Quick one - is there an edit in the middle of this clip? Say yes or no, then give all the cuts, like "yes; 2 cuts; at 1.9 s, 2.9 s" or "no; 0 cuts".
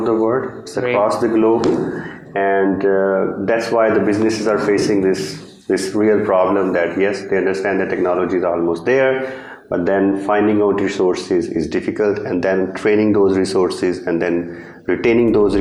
no; 0 cuts